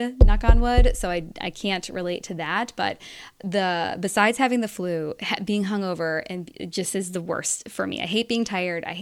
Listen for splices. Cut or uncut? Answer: uncut